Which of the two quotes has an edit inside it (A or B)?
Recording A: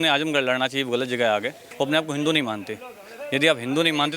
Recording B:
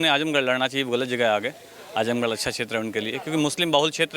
A